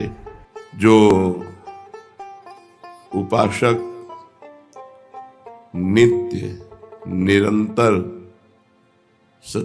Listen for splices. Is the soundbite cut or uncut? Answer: cut